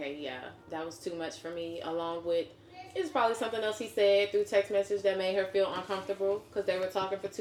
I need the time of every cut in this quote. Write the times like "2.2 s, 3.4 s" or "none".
none